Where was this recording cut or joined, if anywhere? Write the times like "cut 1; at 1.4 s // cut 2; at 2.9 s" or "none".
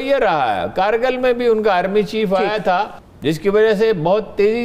cut 1; at 3.0 s